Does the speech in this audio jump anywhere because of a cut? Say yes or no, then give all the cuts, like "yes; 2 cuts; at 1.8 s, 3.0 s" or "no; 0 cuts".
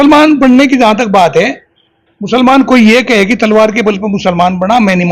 no; 0 cuts